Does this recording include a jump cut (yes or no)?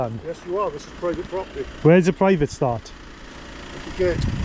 no